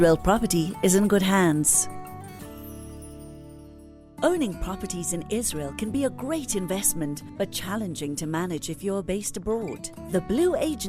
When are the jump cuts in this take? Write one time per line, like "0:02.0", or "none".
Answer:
0:01.7
0:04.1